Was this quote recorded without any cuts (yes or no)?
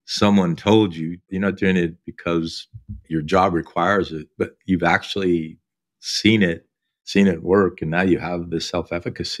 no